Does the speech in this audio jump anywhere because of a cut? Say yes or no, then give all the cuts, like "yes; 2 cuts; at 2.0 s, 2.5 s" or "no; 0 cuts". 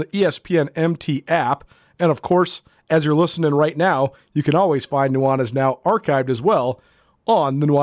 no; 0 cuts